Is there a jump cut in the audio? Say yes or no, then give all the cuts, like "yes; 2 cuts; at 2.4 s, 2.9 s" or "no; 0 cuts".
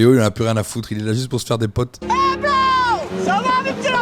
yes; 2 cuts; at 2.0 s, 3.1 s